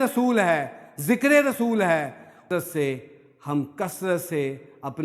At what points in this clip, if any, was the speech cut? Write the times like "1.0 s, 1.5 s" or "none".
2.3 s